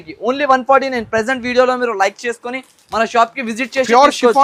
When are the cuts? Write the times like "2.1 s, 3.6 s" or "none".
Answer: none